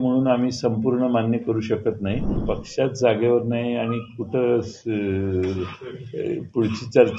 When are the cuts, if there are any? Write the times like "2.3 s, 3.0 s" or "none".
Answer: 2.4 s